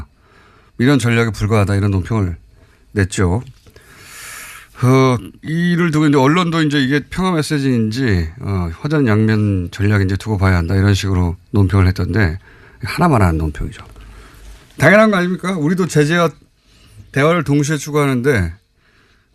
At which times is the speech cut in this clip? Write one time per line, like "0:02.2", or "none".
0:06.2